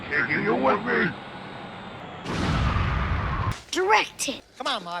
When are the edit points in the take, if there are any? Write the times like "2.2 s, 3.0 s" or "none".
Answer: 3.5 s